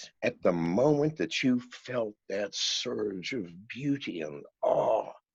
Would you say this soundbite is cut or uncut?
uncut